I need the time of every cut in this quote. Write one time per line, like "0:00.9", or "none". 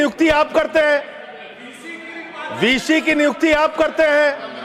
none